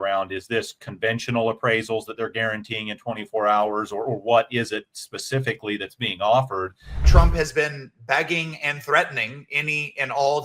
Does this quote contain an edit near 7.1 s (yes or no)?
yes